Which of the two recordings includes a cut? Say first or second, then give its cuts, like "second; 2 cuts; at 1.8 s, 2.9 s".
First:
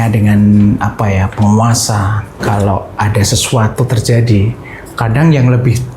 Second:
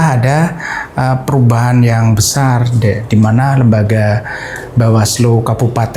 first; 1 cut; at 2.4 s